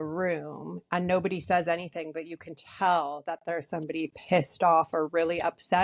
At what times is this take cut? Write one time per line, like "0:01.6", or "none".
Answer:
none